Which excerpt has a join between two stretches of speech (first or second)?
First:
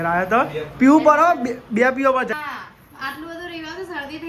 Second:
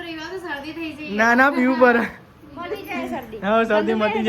first